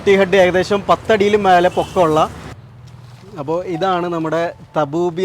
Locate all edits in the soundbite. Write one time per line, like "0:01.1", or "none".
0:02.6